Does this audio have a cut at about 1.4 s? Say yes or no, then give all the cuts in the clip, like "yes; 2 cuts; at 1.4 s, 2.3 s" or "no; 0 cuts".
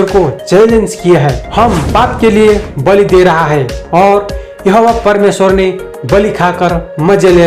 yes; 1 cut; at 1.4 s